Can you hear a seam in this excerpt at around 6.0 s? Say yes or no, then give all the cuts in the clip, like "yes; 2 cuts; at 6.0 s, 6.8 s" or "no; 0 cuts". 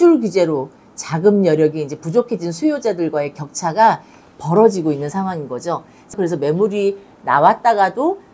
yes; 1 cut; at 6.0 s